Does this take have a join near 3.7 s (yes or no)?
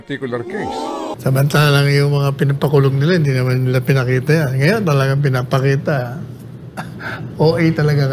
no